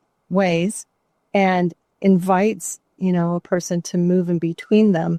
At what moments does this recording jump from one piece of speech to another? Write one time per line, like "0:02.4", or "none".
none

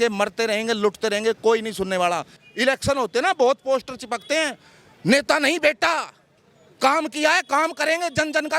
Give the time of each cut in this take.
0:02.4

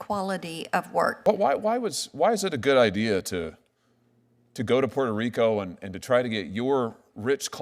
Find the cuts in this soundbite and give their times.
0:01.2

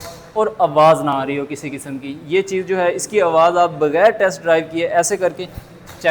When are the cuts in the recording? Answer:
none

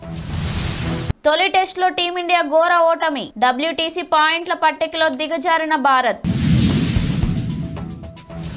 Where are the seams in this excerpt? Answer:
0:01.0

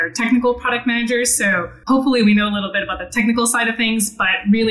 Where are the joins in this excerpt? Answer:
0:01.7

